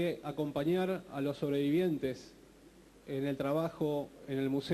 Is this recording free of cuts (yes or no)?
no